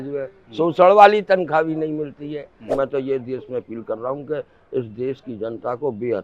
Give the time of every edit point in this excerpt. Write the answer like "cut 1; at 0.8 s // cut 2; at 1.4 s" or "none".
cut 1; at 2.7 s

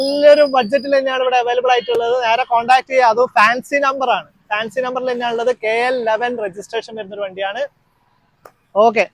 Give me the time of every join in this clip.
none

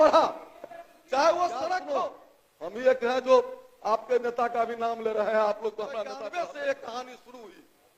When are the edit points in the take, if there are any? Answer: cut 1; at 2.0 s // cut 2; at 6.1 s

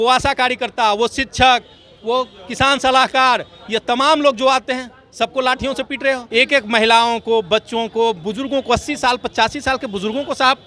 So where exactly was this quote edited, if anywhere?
cut 1; at 6.2 s

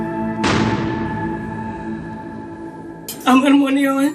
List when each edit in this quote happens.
cut 1; at 3.2 s

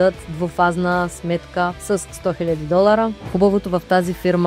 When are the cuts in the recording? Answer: cut 1; at 3.2 s

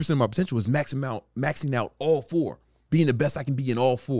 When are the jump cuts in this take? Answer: cut 1; at 2.8 s

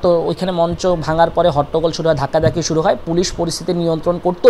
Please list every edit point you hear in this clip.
none

